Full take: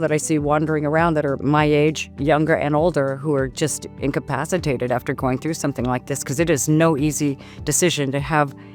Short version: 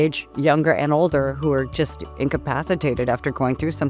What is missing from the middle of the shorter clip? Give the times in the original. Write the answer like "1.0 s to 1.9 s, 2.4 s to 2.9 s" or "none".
none